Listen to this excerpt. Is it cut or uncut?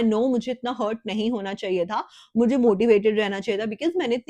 uncut